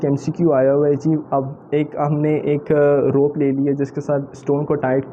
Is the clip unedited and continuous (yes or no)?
yes